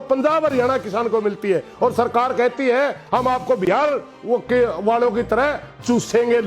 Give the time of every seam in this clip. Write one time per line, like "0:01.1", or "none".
0:03.0